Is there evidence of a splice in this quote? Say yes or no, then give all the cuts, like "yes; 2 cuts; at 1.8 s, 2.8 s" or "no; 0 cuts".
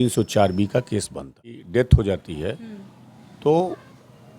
yes; 1 cut; at 1.6 s